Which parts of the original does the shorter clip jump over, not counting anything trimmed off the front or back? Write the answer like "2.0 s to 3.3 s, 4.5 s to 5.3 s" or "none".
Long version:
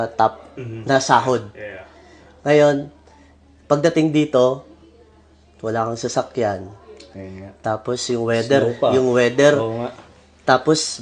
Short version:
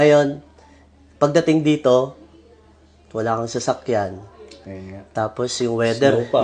none